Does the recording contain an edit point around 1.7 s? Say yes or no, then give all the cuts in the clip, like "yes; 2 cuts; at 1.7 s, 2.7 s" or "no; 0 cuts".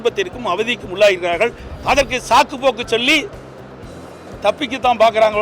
yes; 1 cut; at 1.7 s